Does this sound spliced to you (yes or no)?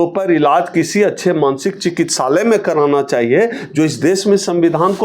no